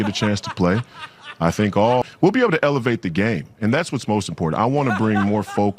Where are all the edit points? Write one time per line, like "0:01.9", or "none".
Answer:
0:02.0